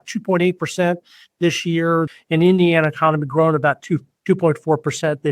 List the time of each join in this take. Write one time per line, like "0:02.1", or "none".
0:02.1